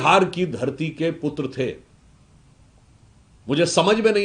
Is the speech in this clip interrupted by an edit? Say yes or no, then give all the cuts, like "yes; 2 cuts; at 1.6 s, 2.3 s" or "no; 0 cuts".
no; 0 cuts